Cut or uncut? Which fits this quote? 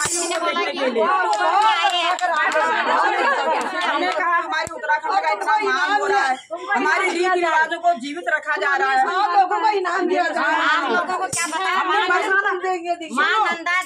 uncut